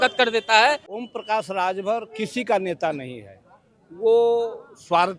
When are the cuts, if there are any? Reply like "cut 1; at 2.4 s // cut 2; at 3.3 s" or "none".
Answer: cut 1; at 0.9 s